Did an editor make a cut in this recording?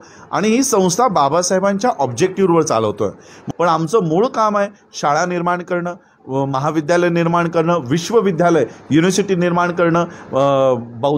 yes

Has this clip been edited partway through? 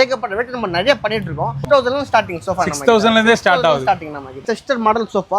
yes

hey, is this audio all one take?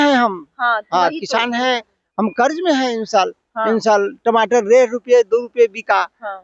yes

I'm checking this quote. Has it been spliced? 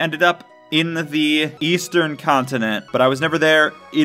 yes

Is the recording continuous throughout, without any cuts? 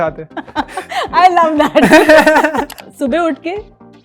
no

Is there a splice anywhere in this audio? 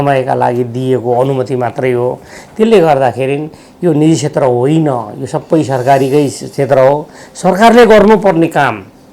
no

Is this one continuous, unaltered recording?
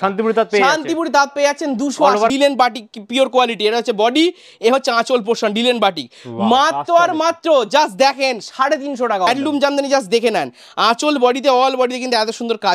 no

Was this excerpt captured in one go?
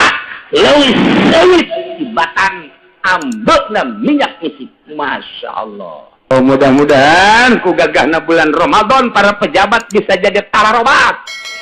no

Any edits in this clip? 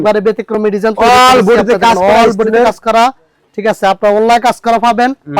no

